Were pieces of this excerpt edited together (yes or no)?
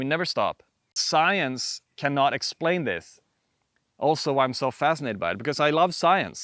yes